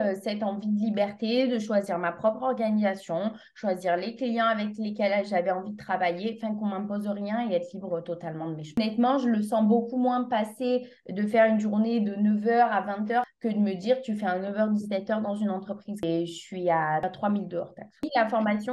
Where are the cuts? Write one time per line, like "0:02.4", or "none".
0:08.8
0:16.0
0:18.0